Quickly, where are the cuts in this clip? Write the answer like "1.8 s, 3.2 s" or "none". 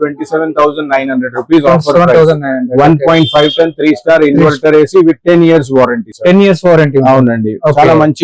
none